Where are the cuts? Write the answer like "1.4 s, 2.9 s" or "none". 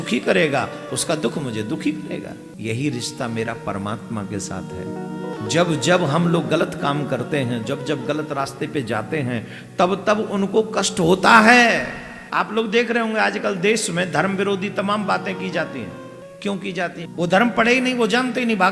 2.5 s, 5.3 s, 12.1 s, 16.2 s, 17.1 s